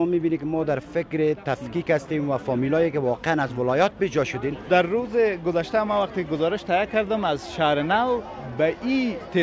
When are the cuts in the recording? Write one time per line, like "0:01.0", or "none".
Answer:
0:04.6